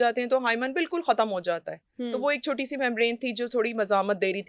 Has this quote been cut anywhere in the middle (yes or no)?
no